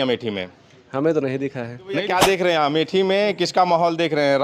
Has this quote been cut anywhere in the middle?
yes; 1 cut; at 2.0 s

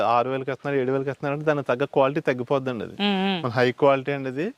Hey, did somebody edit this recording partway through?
no; 0 cuts

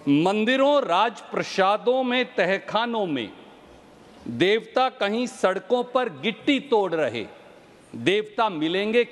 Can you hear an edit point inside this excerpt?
no; 0 cuts

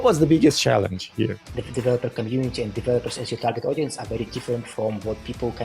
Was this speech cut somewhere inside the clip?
yes; 1 cut; at 1.4 s

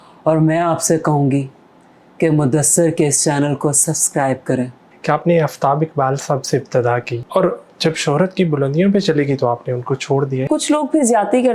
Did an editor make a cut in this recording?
yes; 3 cuts; at 4.8 s, 7.1 s, 10.4 s

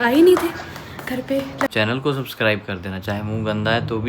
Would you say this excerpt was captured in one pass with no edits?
no; 1 cut; at 1.7 s

